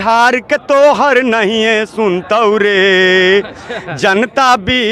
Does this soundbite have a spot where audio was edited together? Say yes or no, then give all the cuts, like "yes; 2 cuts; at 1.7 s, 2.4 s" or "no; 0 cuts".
no; 0 cuts